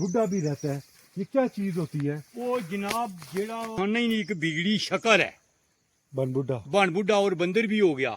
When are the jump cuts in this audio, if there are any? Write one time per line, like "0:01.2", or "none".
0:03.7